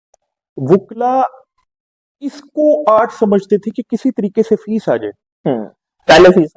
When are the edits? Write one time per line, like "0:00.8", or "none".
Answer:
none